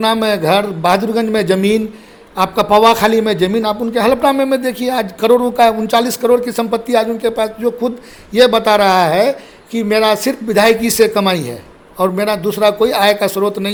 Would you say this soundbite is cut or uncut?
uncut